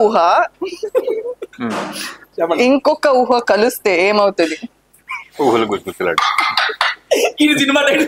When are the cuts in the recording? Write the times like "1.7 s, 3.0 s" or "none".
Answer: none